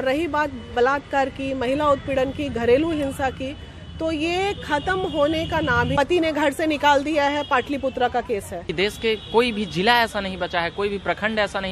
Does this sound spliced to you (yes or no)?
yes